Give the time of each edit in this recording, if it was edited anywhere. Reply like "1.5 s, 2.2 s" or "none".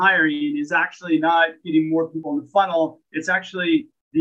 2.2 s

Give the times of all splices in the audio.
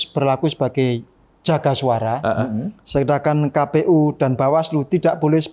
none

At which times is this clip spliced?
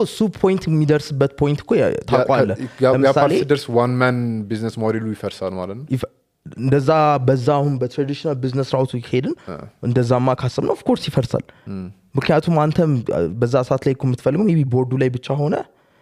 none

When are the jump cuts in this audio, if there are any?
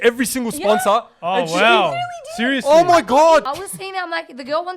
3.5 s

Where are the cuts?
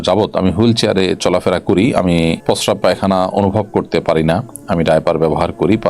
2.4 s

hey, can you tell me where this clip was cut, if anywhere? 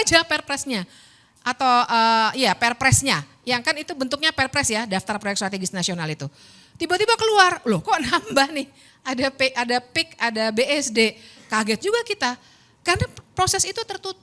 none

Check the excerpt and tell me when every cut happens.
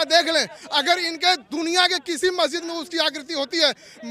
none

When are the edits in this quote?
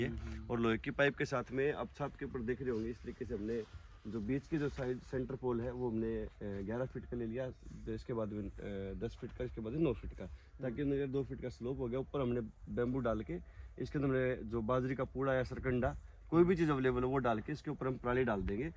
none

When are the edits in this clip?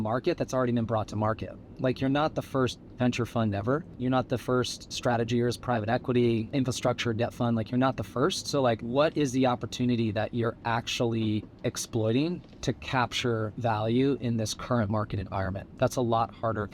3.9 s, 4.8 s, 6.5 s, 8.8 s

